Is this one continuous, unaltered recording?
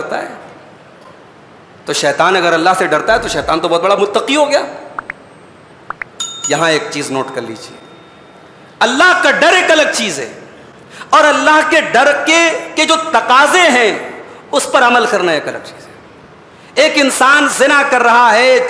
yes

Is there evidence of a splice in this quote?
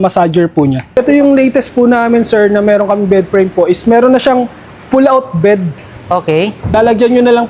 yes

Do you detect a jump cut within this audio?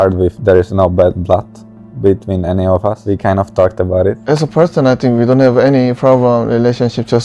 yes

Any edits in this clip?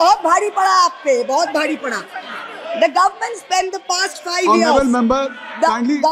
no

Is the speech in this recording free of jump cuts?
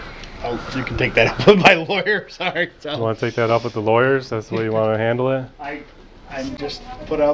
yes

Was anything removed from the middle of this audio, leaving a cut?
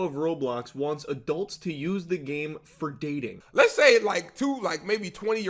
yes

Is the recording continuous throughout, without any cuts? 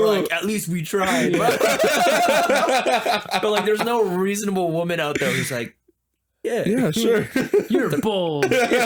yes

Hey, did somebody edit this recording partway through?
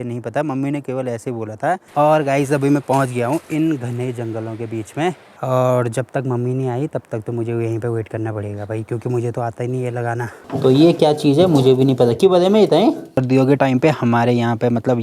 yes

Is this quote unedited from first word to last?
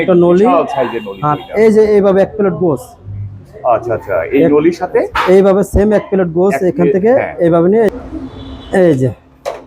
yes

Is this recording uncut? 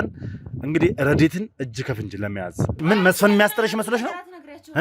no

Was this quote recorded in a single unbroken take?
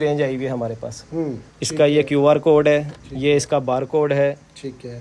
no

